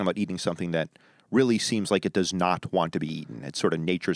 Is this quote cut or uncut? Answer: uncut